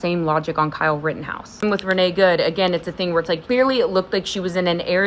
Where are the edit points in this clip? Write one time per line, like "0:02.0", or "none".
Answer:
0:01.6
0:03.4